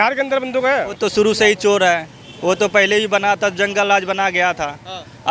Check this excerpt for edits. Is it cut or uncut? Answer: cut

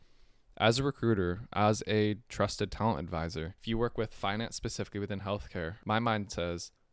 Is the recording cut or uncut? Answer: cut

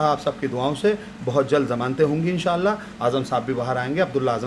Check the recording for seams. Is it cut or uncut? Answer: uncut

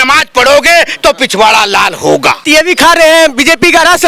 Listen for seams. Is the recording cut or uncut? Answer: cut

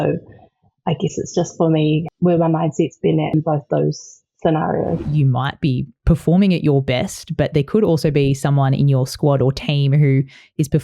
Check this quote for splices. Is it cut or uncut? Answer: cut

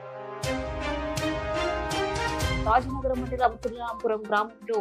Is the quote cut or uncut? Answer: cut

